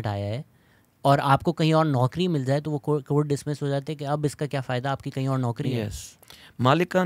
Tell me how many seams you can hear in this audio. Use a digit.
1